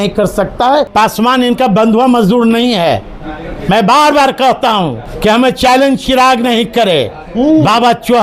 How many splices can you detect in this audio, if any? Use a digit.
2